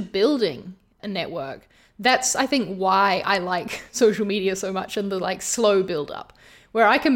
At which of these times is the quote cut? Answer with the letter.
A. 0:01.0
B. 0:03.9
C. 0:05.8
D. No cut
A